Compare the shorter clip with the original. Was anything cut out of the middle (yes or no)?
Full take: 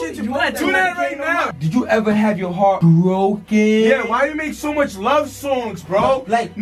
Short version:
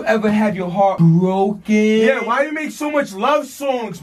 no